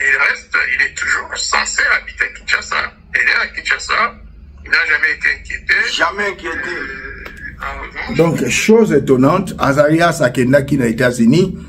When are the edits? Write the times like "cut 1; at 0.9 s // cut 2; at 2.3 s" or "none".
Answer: none